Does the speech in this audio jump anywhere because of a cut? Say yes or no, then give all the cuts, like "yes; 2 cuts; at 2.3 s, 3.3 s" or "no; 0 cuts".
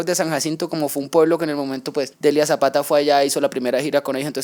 yes; 1 cut; at 2.1 s